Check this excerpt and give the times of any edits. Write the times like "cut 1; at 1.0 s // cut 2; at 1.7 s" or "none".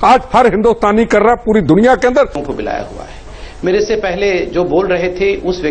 cut 1; at 2.4 s

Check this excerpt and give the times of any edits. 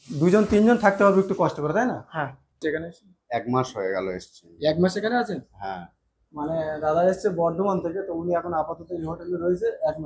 cut 1; at 2.6 s

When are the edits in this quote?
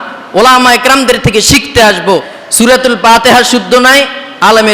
cut 1; at 2.4 s

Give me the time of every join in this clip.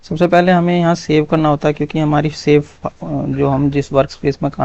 none

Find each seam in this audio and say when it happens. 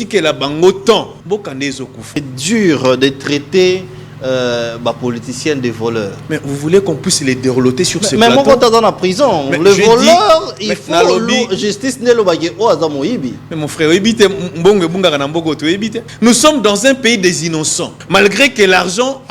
cut 1; at 1.2 s // cut 2; at 2.3 s // cut 3; at 16.0 s // cut 4; at 17.9 s

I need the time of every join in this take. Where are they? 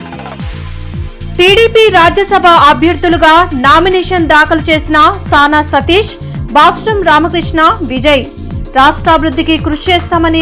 cut 1; at 1.1 s

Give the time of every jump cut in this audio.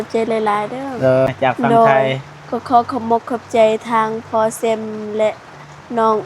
cut 1; at 1.3 s

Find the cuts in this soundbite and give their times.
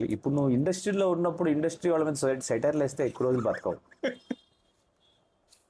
none

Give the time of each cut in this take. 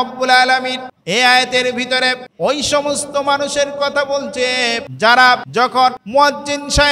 cut 1; at 0.9 s // cut 2; at 2.3 s // cut 3; at 4.9 s // cut 4; at 5.7 s

